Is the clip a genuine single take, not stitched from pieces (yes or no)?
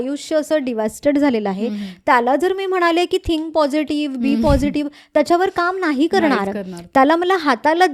yes